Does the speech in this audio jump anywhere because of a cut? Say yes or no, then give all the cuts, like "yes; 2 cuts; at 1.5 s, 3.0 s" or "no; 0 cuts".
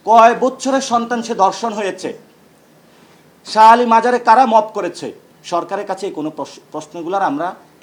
no; 0 cuts